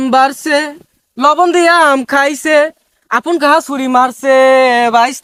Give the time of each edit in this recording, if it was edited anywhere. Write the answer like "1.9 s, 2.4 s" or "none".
none